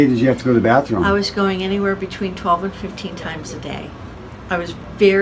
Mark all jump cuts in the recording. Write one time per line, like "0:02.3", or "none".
none